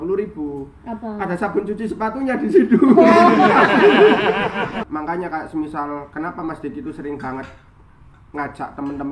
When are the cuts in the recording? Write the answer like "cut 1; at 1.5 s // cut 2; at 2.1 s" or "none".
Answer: cut 1; at 4.8 s